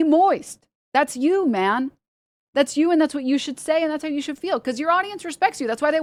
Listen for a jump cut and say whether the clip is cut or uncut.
uncut